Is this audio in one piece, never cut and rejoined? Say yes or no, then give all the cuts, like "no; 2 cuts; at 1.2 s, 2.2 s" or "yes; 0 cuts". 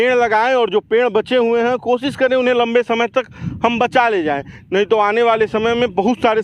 yes; 0 cuts